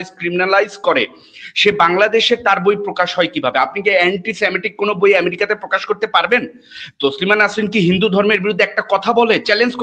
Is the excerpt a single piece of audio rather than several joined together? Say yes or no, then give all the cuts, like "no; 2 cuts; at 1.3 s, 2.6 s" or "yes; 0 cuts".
yes; 0 cuts